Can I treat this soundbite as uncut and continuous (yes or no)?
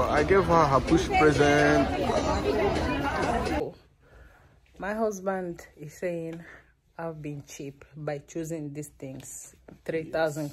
no